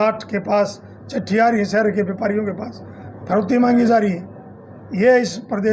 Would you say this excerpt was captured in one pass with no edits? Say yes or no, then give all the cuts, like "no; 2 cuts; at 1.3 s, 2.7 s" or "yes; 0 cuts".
yes; 0 cuts